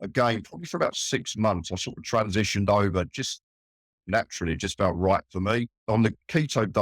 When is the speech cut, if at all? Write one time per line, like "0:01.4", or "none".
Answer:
0:05.8